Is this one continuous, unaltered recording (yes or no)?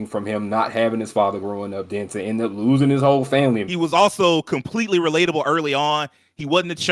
no